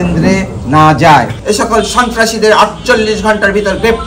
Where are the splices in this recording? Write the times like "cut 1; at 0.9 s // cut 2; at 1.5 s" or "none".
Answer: cut 1; at 1.3 s